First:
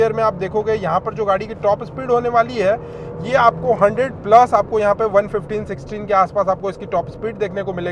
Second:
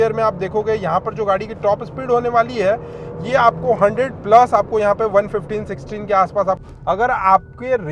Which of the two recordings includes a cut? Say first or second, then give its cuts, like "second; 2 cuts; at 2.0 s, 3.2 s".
second; 1 cut; at 6.7 s